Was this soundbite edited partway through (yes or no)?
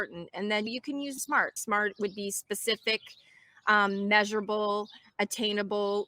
yes